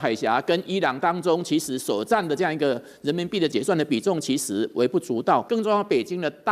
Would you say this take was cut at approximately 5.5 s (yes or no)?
yes